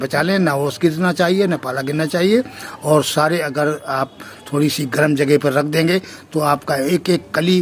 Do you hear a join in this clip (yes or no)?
no